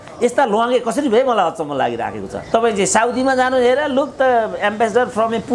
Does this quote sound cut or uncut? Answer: cut